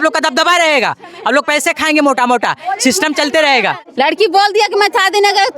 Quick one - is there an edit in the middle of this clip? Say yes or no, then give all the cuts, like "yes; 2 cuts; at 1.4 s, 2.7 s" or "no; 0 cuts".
yes; 1 cut; at 3.8 s